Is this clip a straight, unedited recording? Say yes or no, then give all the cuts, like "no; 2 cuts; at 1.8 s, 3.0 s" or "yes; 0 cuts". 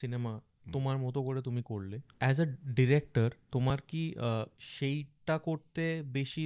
no; 2 cuts; at 2.0 s, 4.6 s